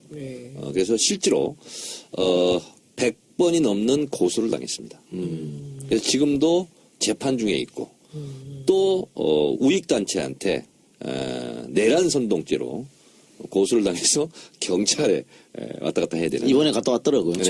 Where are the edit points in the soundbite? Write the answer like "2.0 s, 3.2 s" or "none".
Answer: 9.4 s